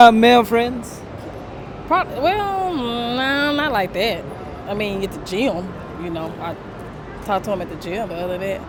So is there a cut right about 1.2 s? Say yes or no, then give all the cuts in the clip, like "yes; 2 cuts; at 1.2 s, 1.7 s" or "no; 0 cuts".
no; 0 cuts